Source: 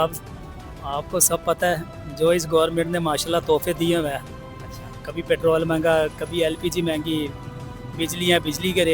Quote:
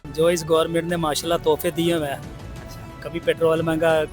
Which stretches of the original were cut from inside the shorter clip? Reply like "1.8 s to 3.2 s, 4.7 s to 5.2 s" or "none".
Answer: none